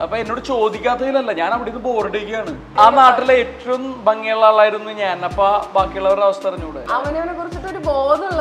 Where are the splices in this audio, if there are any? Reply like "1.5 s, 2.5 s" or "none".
2.7 s, 6.8 s